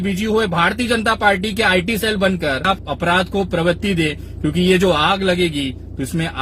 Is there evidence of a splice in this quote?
yes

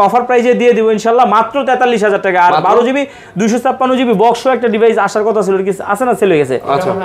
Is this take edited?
no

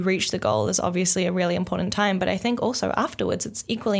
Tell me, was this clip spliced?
no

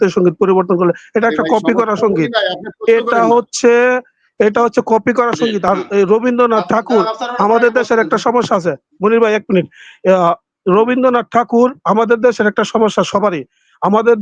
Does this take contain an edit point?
no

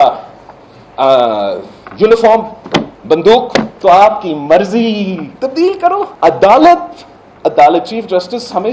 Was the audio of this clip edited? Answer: yes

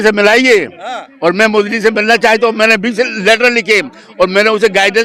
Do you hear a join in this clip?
no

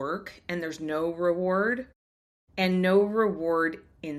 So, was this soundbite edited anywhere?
no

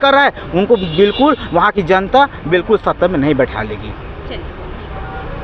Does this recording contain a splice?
no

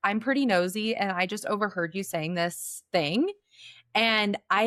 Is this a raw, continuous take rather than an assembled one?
yes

